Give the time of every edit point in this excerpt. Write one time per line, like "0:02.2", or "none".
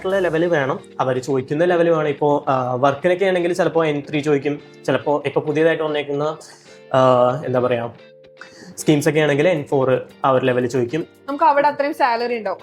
0:11.1